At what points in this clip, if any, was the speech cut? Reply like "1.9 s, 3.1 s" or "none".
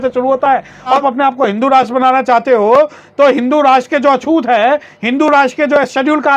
1.0 s